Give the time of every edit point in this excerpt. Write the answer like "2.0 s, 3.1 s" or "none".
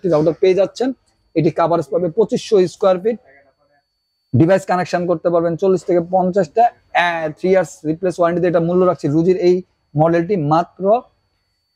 none